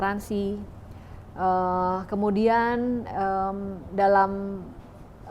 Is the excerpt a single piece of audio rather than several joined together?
yes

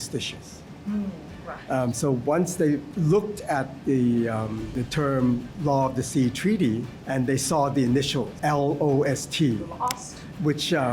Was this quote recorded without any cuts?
no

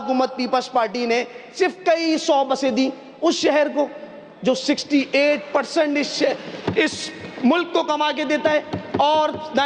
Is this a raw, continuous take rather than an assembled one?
yes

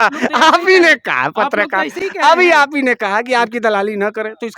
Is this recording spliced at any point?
no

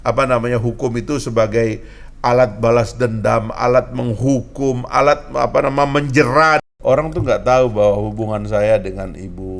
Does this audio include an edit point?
yes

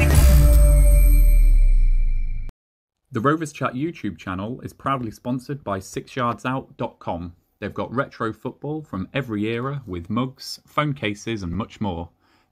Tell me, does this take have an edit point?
yes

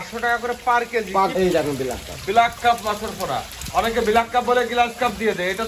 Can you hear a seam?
yes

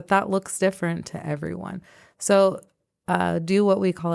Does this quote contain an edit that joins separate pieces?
no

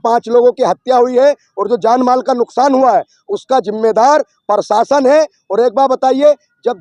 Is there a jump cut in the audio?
no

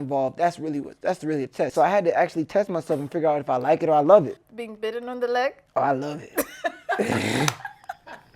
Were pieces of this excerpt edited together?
yes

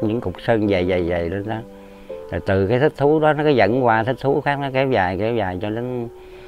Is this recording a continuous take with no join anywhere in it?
yes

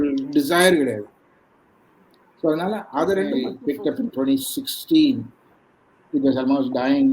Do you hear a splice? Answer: yes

